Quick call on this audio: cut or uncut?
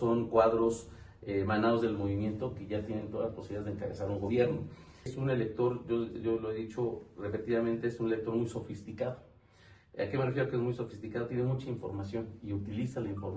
cut